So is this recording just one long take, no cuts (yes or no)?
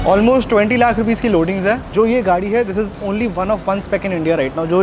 no